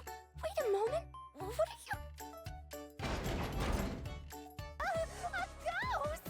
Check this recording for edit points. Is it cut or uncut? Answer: cut